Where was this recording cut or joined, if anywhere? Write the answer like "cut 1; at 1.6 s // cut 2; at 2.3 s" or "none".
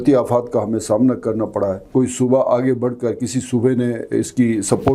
cut 1; at 1.9 s